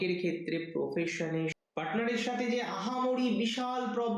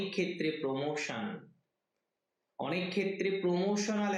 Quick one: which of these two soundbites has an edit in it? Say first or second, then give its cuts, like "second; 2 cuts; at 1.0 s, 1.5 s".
first; 1 cut; at 1.6 s